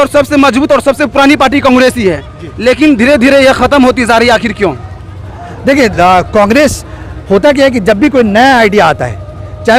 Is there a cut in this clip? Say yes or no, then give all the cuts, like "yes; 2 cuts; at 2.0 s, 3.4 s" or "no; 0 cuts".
no; 0 cuts